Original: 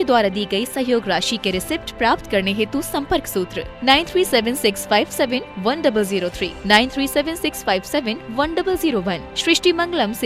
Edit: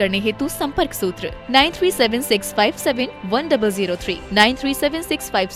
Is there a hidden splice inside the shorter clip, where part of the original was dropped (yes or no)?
no